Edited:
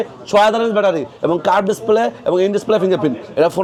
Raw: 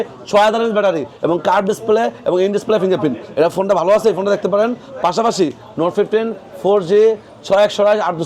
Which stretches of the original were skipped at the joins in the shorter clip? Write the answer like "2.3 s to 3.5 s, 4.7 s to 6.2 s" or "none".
none